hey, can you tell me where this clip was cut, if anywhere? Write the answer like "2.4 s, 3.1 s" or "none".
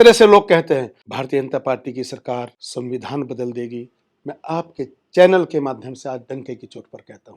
1.0 s, 2.6 s